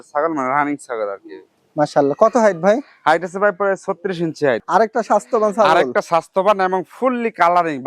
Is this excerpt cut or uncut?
cut